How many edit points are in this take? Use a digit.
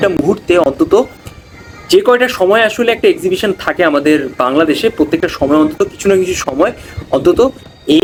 0